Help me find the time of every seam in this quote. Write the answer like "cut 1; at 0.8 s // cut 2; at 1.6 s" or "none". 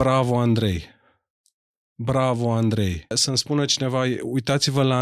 cut 1; at 3.2 s